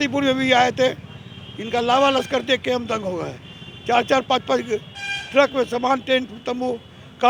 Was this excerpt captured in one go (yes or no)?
yes